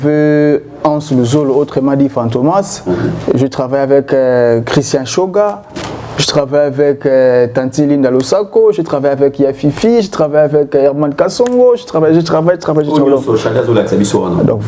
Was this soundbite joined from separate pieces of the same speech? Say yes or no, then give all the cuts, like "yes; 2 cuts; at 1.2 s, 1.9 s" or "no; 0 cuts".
yes; 1 cut; at 3.5 s